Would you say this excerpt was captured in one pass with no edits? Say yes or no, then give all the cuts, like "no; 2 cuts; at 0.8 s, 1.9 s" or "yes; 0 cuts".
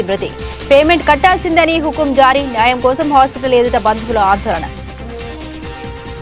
no; 1 cut; at 4.7 s